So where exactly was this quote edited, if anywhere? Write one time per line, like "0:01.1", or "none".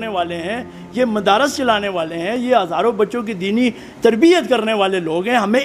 none

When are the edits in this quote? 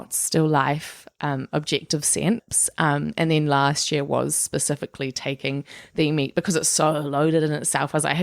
0:02.5

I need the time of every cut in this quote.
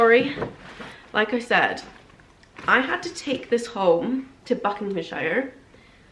none

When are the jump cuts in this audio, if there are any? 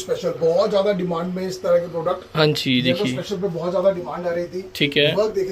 none

